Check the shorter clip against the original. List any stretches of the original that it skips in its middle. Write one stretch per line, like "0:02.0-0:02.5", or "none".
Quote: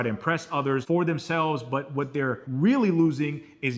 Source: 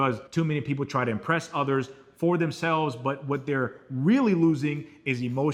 0:01.9-0:02.2
0:03.8-0:03.9